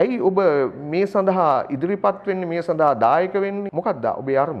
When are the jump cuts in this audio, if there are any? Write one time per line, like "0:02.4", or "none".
0:03.7